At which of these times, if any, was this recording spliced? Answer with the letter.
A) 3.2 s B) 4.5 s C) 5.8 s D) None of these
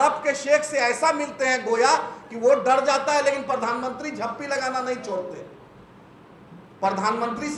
D